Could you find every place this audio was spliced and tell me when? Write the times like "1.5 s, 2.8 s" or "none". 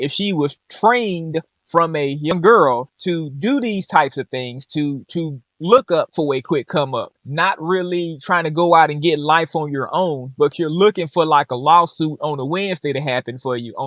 2.3 s